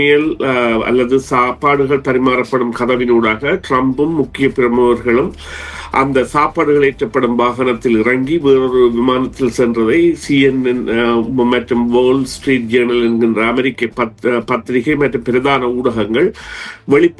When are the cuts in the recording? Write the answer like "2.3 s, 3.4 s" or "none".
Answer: none